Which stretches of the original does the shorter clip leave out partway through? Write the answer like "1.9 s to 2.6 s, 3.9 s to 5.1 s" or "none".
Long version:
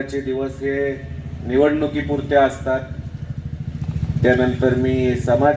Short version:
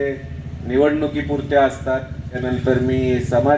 3.2 s to 4.4 s